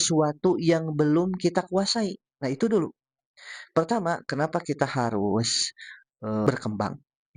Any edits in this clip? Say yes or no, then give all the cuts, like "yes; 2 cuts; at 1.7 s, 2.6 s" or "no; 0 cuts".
yes; 1 cut; at 6.5 s